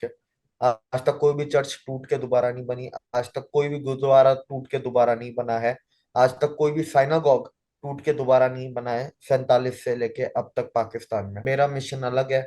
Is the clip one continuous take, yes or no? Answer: no